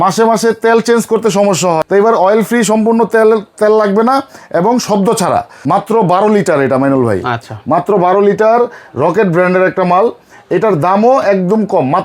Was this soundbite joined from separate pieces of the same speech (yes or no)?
yes